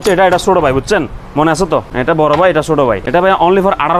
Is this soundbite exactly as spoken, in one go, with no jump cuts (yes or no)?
no